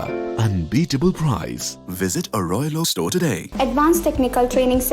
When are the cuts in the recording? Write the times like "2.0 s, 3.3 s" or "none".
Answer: 3.4 s